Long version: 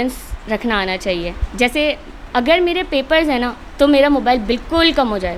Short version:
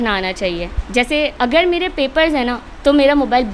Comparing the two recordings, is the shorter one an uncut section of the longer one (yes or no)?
no